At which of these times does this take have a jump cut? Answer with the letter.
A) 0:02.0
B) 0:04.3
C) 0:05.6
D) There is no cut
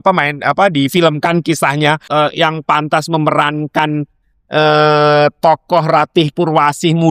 A